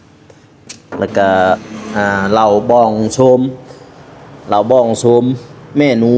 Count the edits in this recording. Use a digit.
1